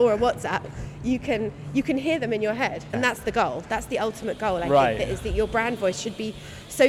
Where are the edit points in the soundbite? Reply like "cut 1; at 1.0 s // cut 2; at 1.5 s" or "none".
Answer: cut 1; at 2.9 s